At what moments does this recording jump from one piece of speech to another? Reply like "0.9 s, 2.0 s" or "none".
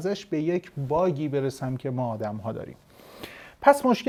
none